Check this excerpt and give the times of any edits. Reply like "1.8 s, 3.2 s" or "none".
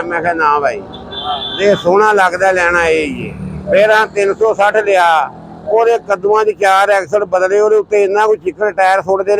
none